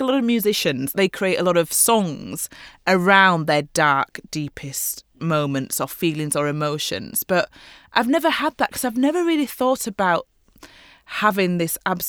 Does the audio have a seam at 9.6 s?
no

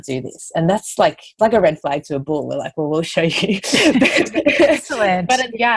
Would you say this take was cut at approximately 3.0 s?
no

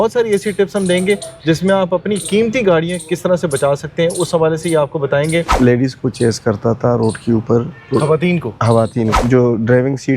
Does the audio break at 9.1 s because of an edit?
yes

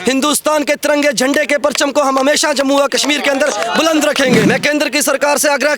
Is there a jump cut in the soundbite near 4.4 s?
yes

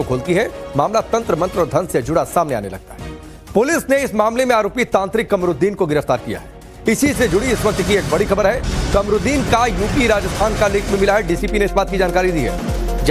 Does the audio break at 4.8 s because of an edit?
yes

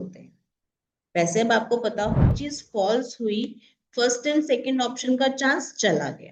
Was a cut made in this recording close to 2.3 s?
yes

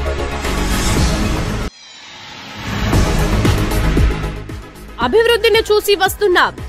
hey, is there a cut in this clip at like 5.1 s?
no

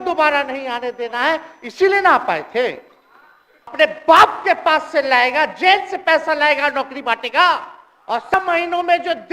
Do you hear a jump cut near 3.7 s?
yes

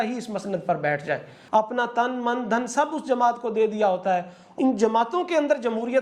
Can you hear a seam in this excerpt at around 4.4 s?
yes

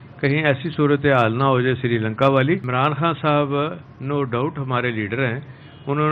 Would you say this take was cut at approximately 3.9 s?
no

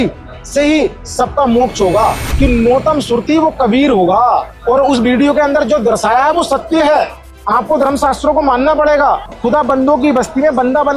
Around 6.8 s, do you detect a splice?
no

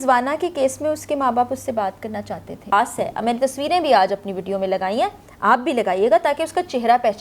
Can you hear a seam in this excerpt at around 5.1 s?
no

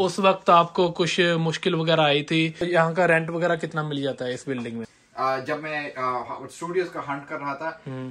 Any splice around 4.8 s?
yes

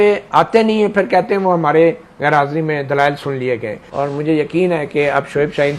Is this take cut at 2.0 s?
no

